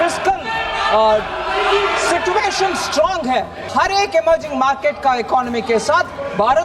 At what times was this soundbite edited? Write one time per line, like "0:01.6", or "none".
0:03.7